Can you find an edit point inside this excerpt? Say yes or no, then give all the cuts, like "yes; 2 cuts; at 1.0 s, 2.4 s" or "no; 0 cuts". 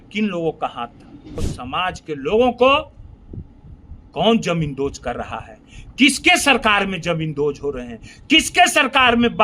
yes; 1 cut; at 1.5 s